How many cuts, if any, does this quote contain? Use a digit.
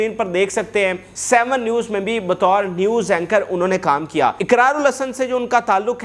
2